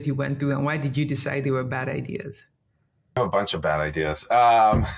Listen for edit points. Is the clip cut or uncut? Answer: uncut